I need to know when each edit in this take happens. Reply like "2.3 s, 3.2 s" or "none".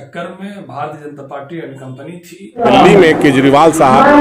2.6 s